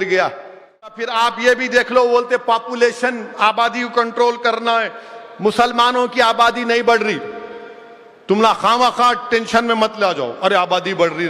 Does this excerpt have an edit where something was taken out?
yes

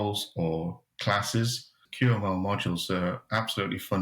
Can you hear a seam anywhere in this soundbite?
yes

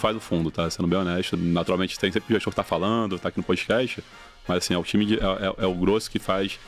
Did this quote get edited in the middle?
yes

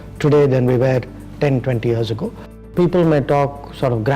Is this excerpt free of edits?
no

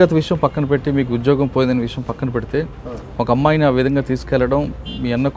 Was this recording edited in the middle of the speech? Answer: no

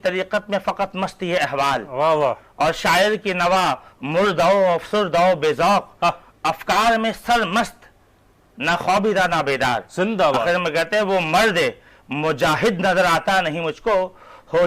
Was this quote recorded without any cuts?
yes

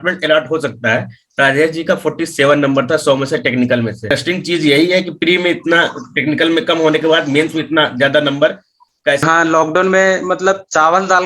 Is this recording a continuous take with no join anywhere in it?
no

